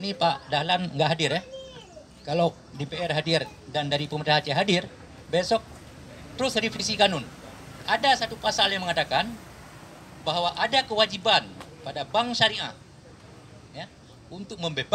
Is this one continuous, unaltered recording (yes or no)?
yes